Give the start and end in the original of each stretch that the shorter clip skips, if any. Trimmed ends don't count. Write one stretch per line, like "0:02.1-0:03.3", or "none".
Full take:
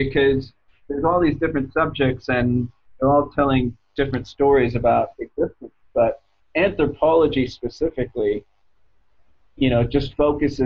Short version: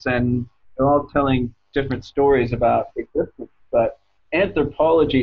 none